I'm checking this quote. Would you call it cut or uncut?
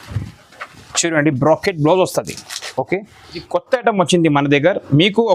cut